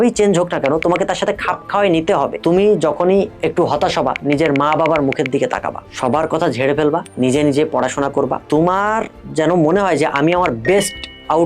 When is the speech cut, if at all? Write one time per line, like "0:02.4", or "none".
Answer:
0:02.3
0:03.3
0:05.9
0:07.1